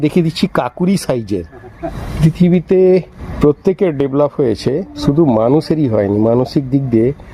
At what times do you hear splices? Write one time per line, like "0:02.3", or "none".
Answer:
0:02.0
0:03.2
0:04.9